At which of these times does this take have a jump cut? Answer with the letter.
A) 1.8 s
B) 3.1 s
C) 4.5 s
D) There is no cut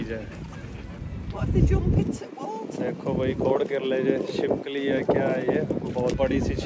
D